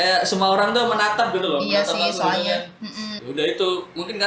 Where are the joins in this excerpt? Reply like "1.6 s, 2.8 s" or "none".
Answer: 3.2 s

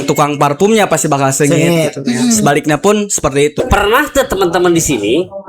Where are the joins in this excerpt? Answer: 3.6 s

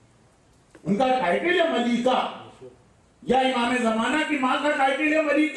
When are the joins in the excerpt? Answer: none

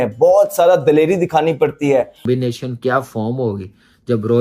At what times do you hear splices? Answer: 2.3 s

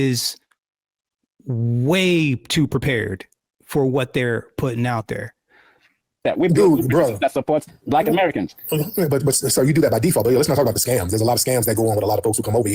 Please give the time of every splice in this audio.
6.1 s

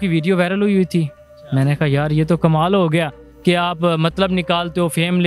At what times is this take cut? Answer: 3.2 s

